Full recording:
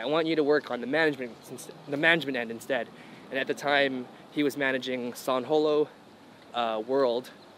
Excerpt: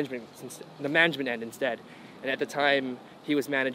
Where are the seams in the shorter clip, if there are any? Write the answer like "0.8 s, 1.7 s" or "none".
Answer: none